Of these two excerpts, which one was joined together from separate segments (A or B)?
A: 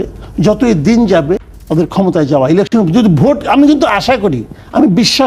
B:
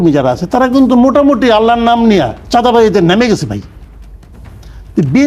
B